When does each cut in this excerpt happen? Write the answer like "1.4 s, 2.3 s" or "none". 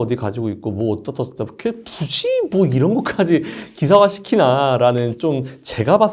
none